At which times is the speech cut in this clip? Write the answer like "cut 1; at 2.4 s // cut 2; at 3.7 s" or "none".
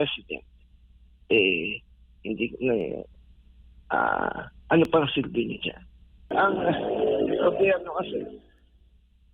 cut 1; at 6.3 s

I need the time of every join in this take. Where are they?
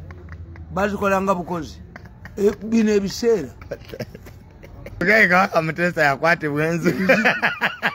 cut 1; at 5.0 s

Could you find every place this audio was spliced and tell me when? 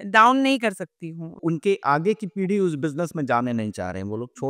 cut 1; at 1.4 s

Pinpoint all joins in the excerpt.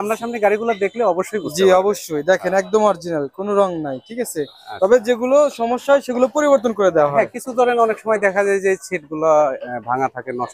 none

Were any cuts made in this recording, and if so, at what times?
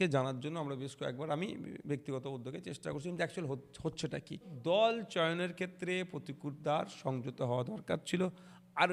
cut 1; at 4.5 s

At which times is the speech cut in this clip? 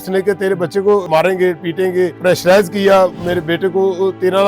cut 1; at 1.1 s // cut 2; at 2.2 s

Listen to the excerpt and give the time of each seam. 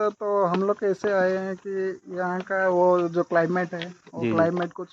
none

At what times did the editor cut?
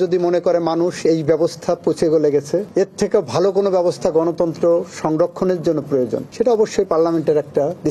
none

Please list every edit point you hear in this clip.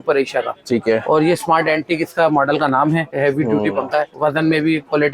cut 1; at 3.1 s // cut 2; at 4.1 s

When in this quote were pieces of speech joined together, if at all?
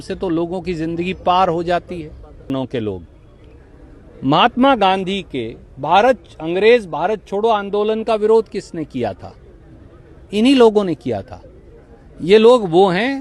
cut 1; at 2.5 s

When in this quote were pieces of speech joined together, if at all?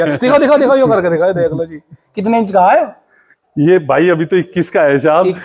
none

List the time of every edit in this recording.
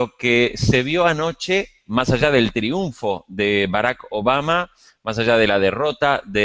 none

